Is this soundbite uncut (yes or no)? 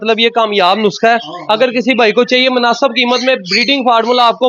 yes